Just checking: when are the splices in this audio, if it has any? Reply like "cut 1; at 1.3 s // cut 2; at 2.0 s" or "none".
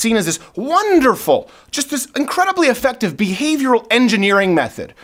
none